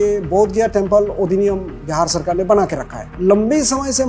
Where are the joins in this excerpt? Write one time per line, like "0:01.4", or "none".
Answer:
0:03.0